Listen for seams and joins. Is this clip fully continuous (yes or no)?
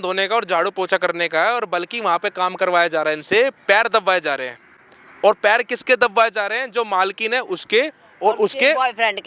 yes